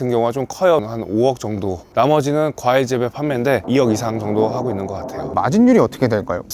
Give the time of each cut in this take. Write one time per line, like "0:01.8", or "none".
0:00.8
0:03.6
0:05.4